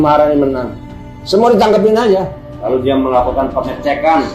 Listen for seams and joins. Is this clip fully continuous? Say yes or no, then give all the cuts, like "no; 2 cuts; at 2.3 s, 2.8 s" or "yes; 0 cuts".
no; 1 cut; at 2.4 s